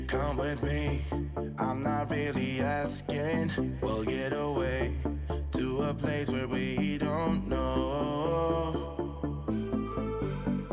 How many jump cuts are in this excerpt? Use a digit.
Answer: 0